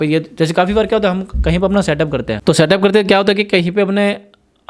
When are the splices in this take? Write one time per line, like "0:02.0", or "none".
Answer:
0:02.3